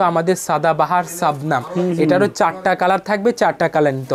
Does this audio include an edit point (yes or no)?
no